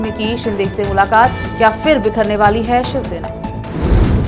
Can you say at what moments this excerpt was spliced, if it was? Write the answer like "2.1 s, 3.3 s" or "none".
none